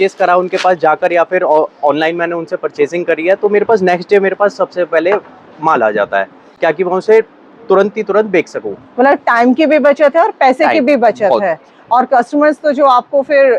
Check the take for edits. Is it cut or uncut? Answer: uncut